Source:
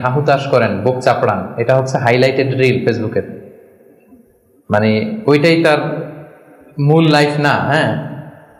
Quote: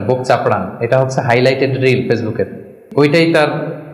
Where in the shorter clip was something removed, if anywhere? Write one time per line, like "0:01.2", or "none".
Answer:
0:02.8